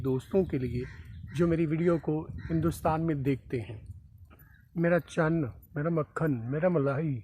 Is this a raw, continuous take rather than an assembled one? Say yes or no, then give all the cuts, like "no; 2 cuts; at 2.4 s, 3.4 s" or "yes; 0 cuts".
yes; 0 cuts